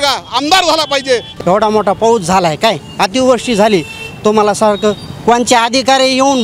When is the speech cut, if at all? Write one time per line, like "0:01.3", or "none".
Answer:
0:01.3